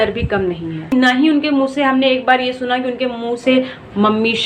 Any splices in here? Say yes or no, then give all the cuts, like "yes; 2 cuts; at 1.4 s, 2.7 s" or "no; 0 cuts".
yes; 1 cut; at 0.9 s